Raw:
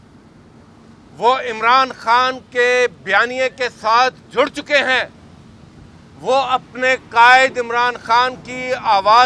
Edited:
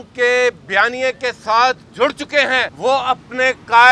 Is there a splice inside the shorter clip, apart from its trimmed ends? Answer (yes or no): yes